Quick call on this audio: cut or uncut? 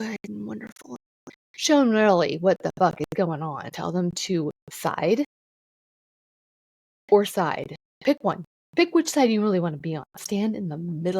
cut